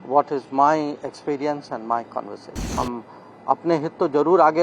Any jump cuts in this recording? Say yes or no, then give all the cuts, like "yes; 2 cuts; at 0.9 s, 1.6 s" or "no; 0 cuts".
yes; 1 cut; at 2.6 s